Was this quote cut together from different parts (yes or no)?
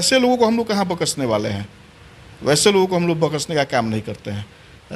no